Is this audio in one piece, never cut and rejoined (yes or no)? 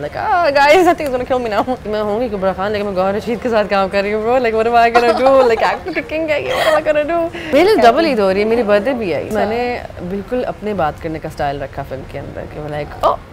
no